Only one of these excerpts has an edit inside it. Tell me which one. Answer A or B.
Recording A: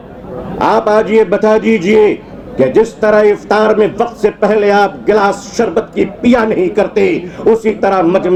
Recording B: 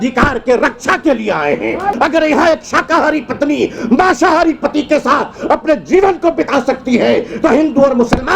B